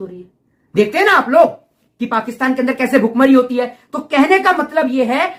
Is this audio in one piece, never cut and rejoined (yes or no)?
yes